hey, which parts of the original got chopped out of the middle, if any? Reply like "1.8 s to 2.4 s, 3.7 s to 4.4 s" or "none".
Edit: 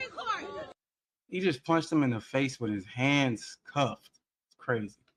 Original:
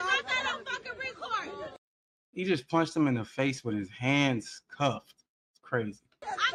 none